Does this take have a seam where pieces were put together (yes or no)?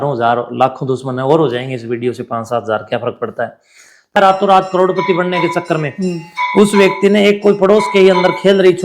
yes